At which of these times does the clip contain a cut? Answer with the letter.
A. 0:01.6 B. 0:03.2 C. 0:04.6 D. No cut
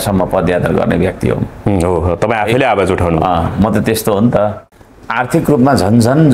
C